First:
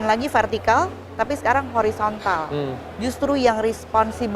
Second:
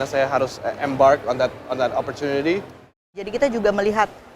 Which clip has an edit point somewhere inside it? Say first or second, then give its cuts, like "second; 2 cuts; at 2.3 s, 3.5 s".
second; 1 cut; at 3.2 s